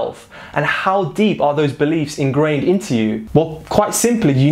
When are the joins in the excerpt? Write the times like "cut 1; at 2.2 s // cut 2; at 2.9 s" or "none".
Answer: cut 1; at 3.2 s